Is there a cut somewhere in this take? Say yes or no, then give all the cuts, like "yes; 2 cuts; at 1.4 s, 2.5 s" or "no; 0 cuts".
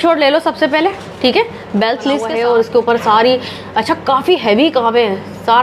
yes; 1 cut; at 2.3 s